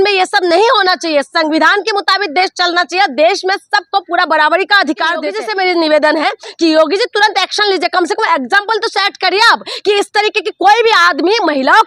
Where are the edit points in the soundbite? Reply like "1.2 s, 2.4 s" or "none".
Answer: 5.3 s